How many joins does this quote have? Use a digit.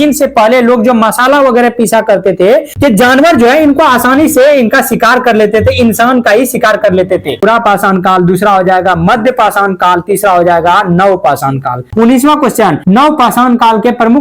4